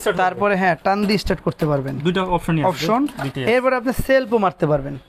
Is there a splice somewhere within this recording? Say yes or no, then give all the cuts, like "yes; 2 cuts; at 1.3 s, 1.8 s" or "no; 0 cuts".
no; 0 cuts